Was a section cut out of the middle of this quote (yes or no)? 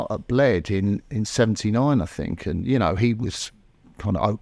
yes